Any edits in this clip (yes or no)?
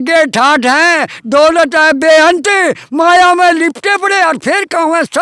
no